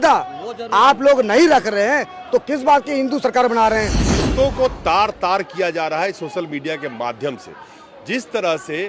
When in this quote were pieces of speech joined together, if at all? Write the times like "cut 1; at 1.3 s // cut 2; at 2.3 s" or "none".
cut 1; at 4.0 s